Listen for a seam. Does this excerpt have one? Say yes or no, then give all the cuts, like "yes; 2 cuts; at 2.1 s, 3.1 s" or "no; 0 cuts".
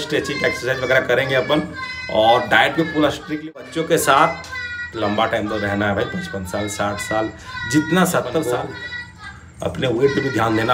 yes; 2 cuts; at 3.5 s, 8.5 s